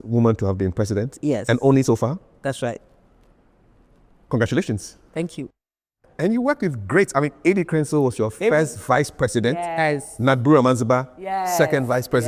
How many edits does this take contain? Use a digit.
1